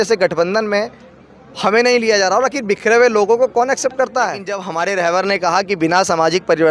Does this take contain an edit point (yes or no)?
yes